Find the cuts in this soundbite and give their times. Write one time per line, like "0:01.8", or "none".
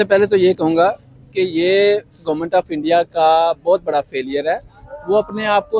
none